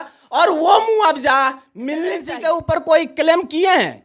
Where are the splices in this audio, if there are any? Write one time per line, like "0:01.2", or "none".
0:02.2